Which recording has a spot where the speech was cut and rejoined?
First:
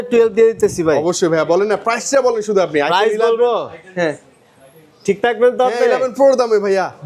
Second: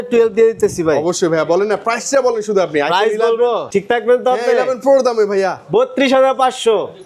second; 1 cut; at 3.6 s

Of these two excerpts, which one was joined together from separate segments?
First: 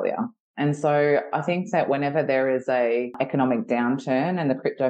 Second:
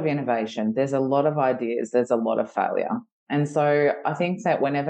first; 1 cut; at 3.1 s

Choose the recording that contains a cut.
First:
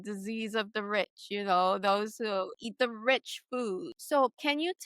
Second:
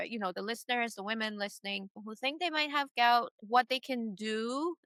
first; 2 cuts; at 2.6 s, 3.9 s

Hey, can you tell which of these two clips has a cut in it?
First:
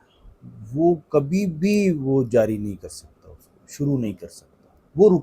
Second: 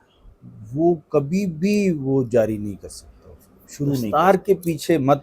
second; 1 cut; at 4.1 s

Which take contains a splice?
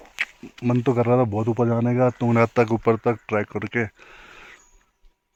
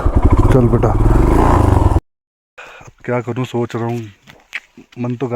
second; 1 cut; at 2.0 s

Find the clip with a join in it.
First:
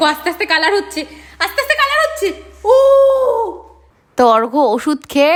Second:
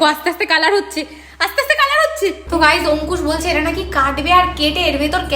second; 1 cut; at 2.4 s

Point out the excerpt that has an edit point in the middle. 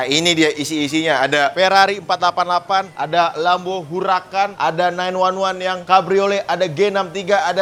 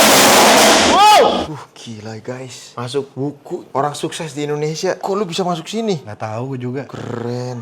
second; 2 cuts; at 1.5 s, 5.0 s

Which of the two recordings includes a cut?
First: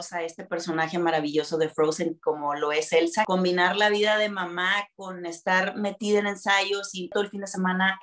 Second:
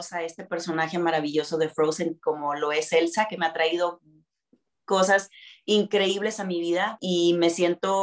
first; 2 cuts; at 3.3 s, 7.1 s

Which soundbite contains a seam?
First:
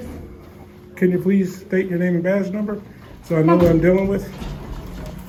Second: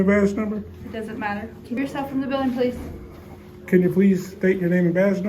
second; 1 cut; at 1.8 s

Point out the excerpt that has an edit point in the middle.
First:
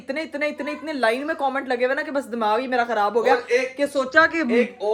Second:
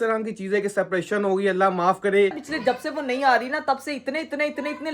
second; 1 cut; at 2.3 s

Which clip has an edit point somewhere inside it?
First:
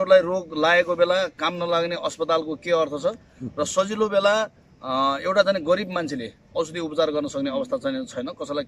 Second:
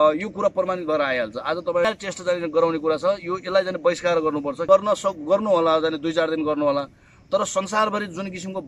second; 2 cuts; at 1.8 s, 4.6 s

